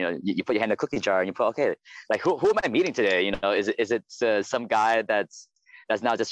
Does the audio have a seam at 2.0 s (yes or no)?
no